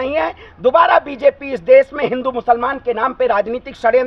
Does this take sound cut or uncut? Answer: uncut